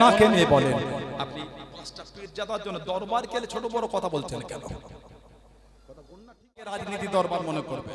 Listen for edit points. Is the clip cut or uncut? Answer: cut